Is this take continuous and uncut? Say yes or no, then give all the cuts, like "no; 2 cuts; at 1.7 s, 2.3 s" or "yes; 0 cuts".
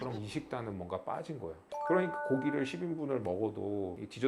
no; 1 cut; at 1.6 s